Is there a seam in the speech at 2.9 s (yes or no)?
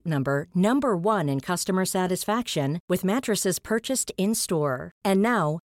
no